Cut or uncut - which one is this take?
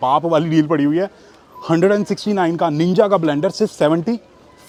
uncut